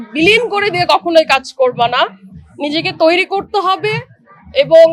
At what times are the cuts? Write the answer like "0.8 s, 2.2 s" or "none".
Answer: none